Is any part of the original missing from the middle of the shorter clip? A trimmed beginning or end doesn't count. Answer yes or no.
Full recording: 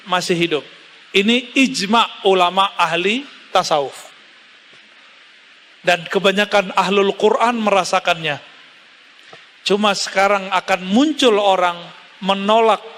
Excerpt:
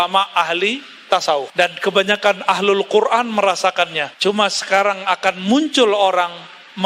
yes